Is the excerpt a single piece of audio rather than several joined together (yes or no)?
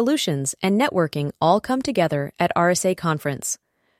yes